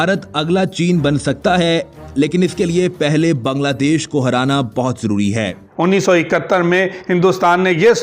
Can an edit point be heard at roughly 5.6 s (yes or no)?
yes